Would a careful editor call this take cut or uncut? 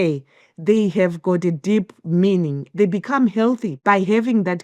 cut